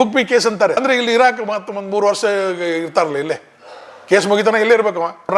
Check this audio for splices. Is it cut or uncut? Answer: uncut